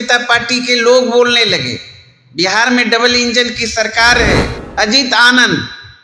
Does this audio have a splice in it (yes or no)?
yes